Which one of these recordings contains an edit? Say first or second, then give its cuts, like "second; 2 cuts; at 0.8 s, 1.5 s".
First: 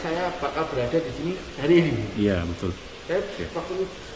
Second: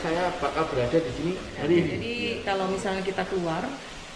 second; 1 cut; at 2.0 s